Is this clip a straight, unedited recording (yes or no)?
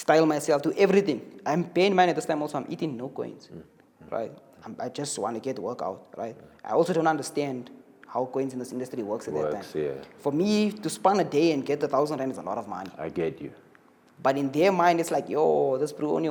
yes